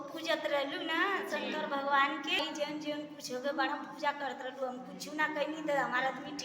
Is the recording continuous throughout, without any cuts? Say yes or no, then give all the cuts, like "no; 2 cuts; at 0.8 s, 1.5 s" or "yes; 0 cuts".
no; 1 cut; at 2.4 s